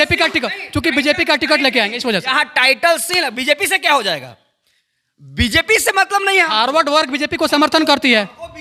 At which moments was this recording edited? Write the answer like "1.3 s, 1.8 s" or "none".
none